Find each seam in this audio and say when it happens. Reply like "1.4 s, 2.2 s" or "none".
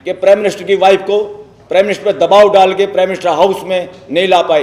none